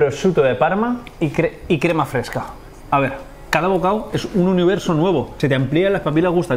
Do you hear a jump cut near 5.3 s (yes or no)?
yes